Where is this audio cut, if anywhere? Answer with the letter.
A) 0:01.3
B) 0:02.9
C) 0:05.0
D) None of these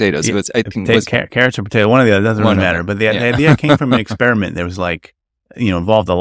D